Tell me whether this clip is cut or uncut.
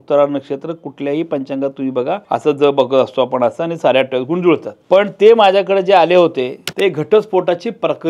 cut